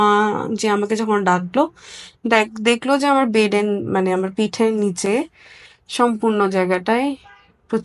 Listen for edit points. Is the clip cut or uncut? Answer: uncut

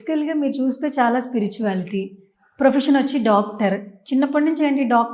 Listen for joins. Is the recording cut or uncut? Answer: uncut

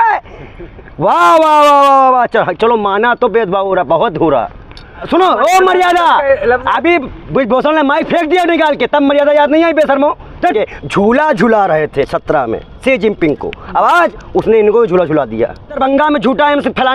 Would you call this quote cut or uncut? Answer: cut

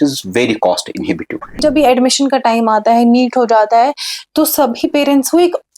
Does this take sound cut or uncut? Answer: cut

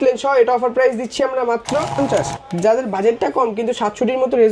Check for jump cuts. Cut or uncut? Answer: cut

